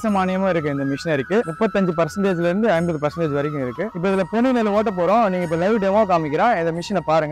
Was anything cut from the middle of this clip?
yes; 1 cut; at 3.9 s

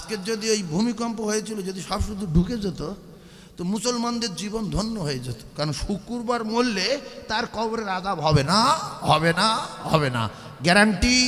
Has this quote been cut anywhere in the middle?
no; 0 cuts

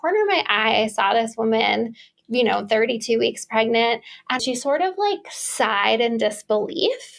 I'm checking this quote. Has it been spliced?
yes; 1 cut; at 4.4 s

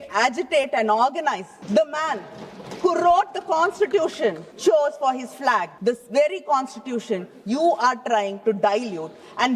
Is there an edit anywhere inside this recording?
yes; 3 cuts; at 1.5 s, 4.5 s, 5.7 s

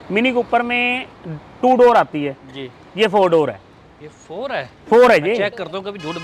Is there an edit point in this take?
no; 0 cuts

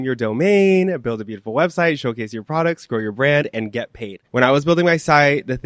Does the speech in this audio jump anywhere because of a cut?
yes; 1 cut; at 4.2 s

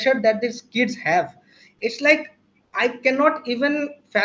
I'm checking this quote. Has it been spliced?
no; 0 cuts

